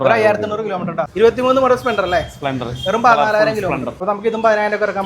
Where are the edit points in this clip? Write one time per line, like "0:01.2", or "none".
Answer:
0:01.1
0:04.0